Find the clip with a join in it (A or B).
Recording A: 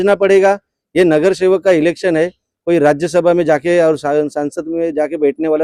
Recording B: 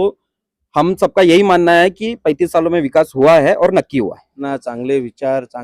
B